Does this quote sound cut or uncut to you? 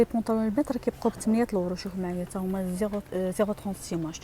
uncut